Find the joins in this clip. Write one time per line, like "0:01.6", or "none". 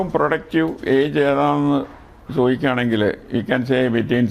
none